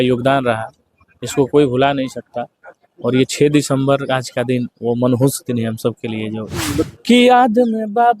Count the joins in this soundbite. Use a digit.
1